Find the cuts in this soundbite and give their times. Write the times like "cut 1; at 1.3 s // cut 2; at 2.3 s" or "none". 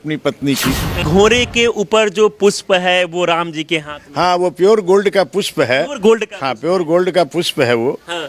cut 1; at 1.0 s